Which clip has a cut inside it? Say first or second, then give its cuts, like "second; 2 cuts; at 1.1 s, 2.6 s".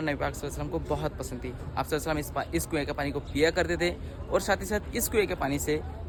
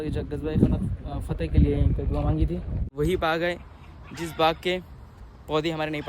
second; 1 cut; at 2.8 s